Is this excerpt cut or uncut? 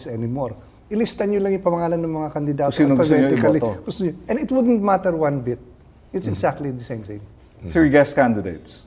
uncut